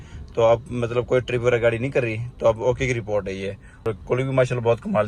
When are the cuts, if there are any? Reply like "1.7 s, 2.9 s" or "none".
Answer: 3.8 s